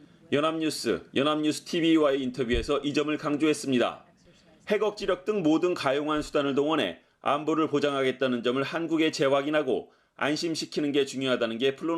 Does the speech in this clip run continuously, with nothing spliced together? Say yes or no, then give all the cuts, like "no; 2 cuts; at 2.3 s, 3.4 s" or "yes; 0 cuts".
yes; 0 cuts